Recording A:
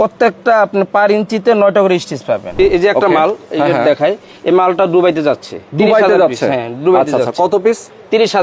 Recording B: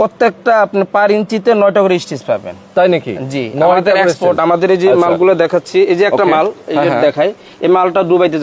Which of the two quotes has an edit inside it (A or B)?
A